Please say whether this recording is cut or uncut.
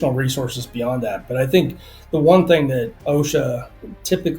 cut